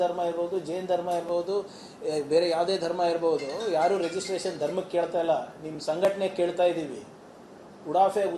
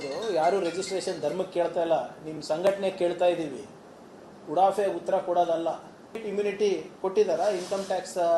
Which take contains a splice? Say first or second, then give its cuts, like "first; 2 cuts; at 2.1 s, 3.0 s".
second; 1 cut; at 6.3 s